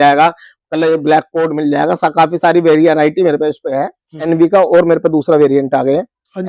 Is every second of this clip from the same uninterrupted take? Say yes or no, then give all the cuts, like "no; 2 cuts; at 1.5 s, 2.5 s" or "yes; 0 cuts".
no; 1 cut; at 4.2 s